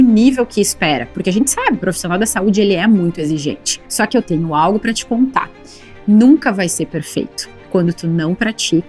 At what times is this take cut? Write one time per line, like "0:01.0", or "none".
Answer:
0:04.1